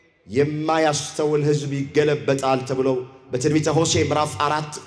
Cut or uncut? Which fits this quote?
uncut